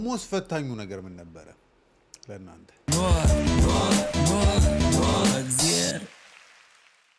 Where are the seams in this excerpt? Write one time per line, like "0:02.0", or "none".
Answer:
none